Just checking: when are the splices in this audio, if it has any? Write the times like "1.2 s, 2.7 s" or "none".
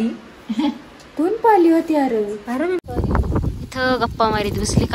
2.8 s